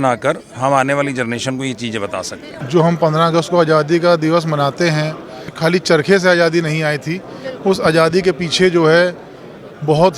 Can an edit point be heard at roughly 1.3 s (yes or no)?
no